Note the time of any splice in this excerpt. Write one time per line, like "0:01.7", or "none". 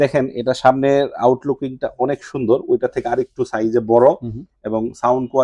none